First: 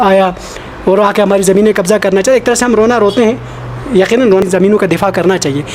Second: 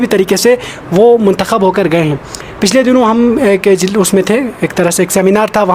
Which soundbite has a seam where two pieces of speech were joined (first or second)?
first